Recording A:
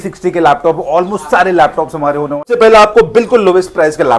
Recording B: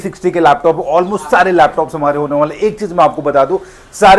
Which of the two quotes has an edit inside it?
A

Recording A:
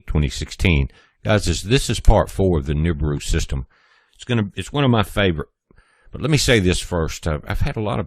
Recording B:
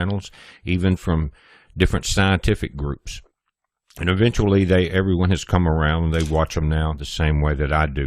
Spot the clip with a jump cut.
B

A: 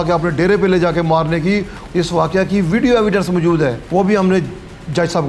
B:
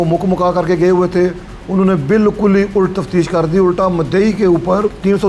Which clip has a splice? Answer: A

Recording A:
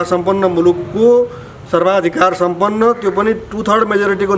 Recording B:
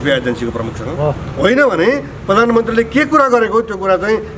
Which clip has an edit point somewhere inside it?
B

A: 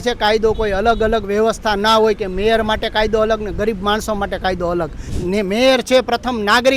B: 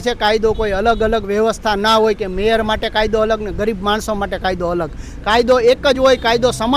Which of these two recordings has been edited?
A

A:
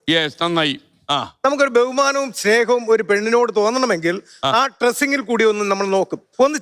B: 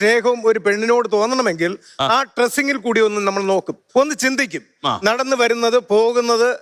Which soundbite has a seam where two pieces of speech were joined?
A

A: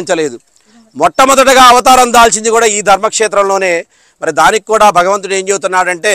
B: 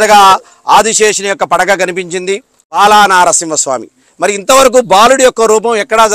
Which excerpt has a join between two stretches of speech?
B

